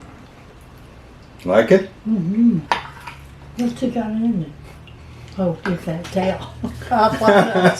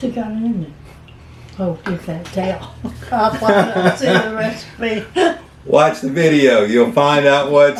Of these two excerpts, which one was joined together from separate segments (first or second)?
first